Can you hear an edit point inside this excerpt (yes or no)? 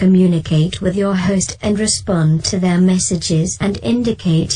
no